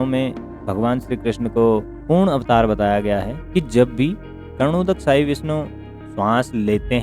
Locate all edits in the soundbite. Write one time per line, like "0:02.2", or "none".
0:03.4